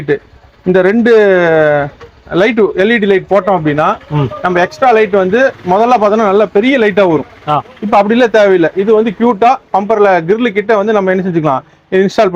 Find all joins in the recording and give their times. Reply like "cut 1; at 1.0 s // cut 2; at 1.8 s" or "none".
none